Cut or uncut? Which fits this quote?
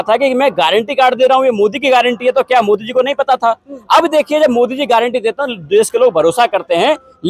uncut